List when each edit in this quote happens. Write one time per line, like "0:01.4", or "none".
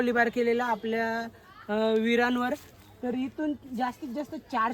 none